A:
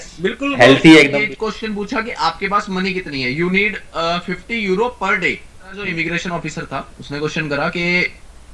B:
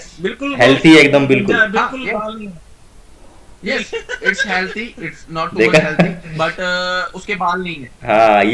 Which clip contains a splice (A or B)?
A